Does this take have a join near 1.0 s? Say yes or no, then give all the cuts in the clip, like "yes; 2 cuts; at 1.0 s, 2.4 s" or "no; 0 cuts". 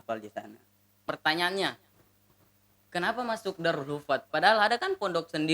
yes; 1 cut; at 1.0 s